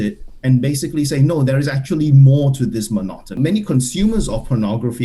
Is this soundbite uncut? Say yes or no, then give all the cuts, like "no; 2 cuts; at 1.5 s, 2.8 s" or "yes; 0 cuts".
no; 1 cut; at 3.3 s